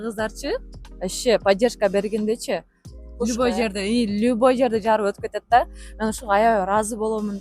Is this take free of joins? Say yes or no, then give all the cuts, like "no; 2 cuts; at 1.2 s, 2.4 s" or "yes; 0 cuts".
yes; 0 cuts